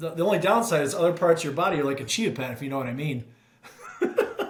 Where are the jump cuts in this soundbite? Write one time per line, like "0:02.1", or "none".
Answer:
none